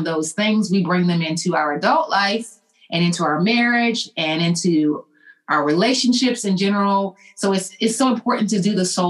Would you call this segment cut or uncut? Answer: uncut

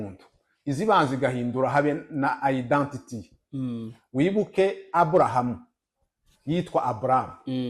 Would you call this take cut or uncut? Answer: uncut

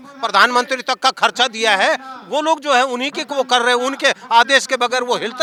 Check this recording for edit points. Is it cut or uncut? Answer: uncut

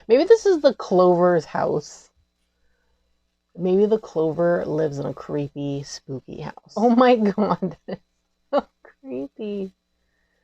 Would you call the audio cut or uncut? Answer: cut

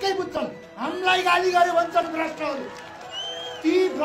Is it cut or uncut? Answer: uncut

